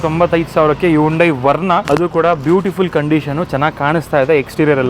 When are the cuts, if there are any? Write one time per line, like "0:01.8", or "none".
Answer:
0:01.8